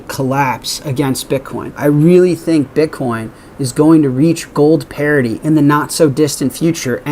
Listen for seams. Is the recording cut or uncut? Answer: cut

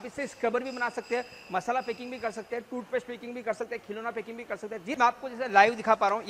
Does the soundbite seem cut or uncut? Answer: cut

